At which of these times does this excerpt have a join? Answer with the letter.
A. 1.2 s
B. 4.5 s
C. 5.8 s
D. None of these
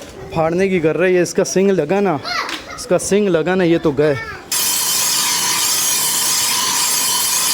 B